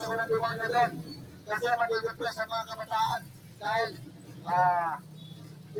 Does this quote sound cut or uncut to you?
uncut